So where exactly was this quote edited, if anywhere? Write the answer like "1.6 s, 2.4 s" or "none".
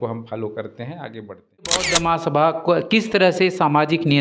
1.8 s